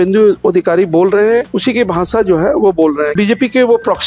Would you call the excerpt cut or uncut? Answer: cut